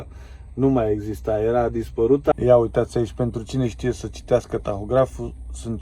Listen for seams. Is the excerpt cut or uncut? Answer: cut